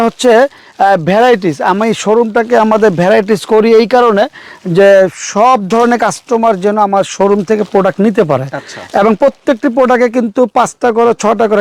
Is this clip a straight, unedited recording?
yes; 0 cuts

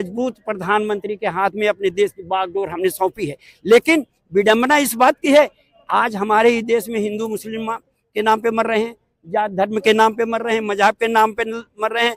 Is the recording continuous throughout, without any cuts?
yes; 0 cuts

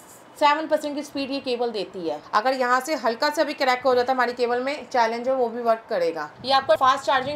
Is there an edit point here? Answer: yes; 2 cuts; at 2.2 s, 6.3 s

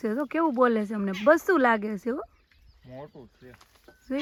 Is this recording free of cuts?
yes; 0 cuts

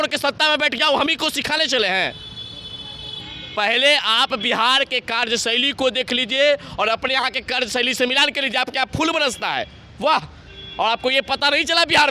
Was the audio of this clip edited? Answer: no; 0 cuts

